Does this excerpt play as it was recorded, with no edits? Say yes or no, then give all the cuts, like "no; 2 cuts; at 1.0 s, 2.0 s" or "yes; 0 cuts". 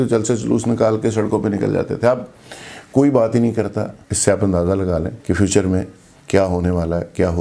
no; 2 cuts; at 4.0 s, 5.1 s